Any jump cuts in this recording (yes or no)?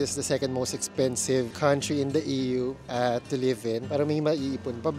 no